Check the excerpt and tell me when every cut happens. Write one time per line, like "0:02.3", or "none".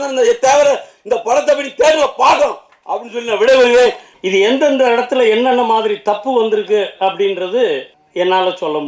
0:04.1
0:08.0